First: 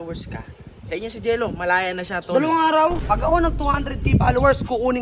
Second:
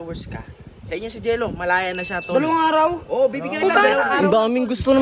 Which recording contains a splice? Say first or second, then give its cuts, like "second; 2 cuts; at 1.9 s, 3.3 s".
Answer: first; 1 cut; at 3.0 s